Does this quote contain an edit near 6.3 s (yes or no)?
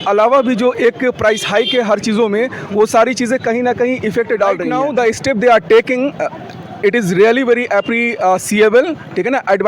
no